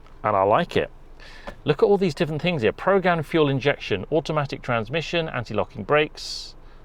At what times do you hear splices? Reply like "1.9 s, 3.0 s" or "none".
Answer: none